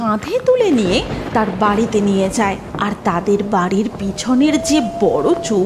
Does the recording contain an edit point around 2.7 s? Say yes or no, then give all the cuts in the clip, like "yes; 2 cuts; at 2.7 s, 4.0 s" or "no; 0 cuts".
yes; 1 cut; at 2.7 s